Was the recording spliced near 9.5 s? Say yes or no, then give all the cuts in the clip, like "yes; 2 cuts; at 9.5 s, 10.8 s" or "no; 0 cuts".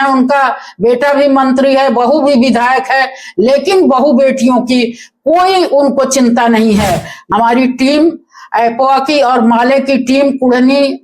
no; 1 cut; at 7.1 s